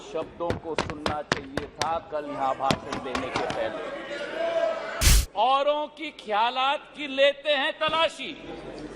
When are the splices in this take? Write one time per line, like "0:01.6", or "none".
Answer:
0:05.1